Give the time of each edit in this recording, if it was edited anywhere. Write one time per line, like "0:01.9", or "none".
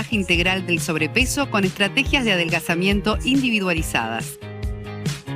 0:04.3